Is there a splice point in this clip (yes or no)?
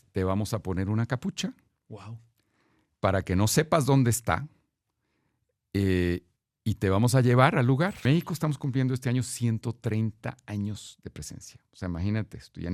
yes